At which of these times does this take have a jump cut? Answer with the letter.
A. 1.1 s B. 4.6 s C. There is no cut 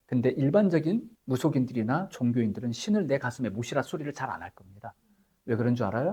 A